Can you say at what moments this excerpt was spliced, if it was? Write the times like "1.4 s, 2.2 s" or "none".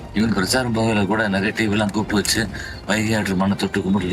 none